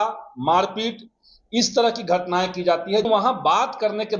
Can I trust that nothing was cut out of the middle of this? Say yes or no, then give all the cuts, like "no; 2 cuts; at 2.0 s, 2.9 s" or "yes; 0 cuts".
no; 1 cut; at 3.1 s